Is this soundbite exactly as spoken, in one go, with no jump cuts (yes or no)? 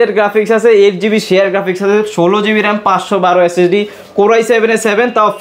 yes